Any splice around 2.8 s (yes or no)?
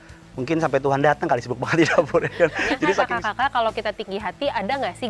yes